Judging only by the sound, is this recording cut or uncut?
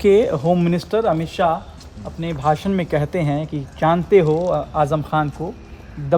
uncut